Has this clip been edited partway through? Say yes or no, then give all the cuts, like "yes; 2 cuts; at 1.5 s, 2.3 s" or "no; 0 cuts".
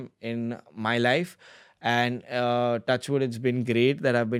no; 0 cuts